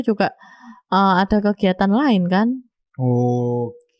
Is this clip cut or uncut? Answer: uncut